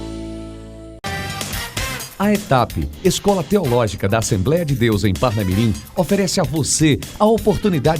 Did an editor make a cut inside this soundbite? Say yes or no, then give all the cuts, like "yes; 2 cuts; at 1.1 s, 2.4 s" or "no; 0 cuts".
yes; 1 cut; at 0.9 s